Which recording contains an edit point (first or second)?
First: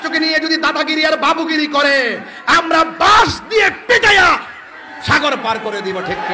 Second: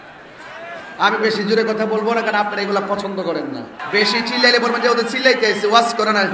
second